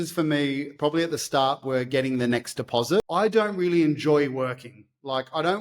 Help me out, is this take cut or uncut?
cut